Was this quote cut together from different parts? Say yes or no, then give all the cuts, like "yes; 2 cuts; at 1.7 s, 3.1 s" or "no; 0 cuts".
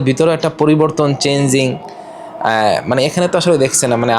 no; 0 cuts